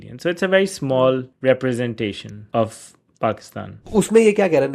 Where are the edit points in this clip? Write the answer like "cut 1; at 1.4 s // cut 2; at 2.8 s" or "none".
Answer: cut 1; at 1.3 s // cut 2; at 2.3 s // cut 3; at 3.8 s